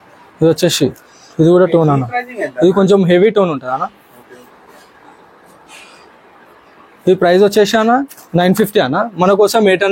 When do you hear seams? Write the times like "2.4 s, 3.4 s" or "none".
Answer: none

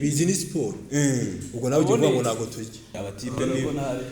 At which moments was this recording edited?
2.9 s

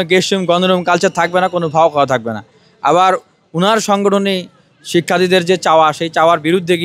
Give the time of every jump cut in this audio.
none

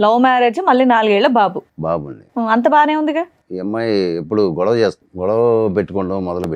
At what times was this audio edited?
3.4 s, 5.1 s

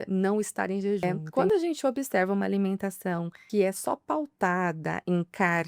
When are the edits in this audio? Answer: 1.0 s, 3.4 s

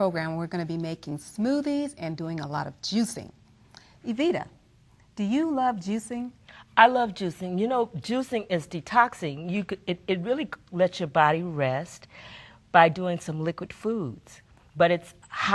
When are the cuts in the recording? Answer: 4.2 s

